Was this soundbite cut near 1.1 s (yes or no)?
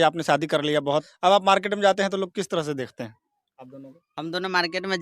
yes